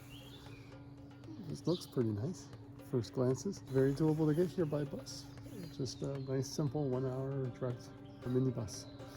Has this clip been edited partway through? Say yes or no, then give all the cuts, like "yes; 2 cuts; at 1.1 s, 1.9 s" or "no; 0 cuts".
yes; 2 cuts; at 3.6 s, 8.3 s